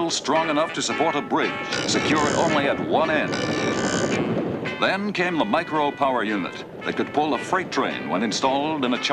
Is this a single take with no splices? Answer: yes; 0 cuts

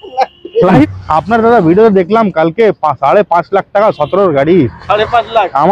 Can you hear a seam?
yes; 1 cut; at 0.9 s

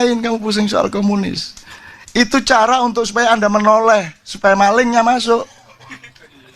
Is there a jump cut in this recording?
no; 0 cuts

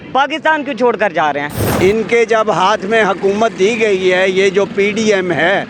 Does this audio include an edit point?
yes; 1 cut; at 1.6 s

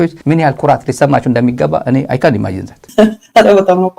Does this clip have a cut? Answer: yes; 1 cut; at 2.7 s

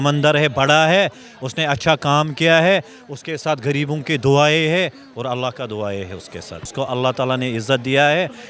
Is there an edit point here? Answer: yes; 1 cut; at 6.6 s

